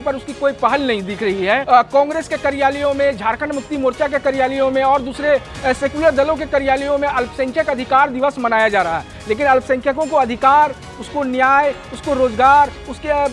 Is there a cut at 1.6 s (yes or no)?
yes